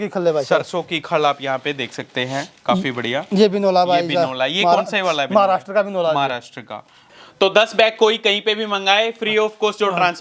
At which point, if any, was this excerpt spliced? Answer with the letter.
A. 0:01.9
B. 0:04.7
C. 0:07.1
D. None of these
C